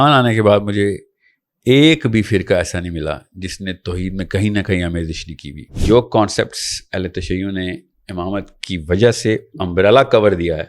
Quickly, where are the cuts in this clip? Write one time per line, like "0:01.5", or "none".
0:05.7